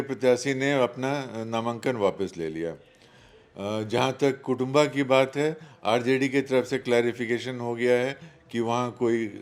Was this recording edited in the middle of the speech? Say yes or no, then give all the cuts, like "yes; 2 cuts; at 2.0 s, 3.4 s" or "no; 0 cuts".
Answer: no; 0 cuts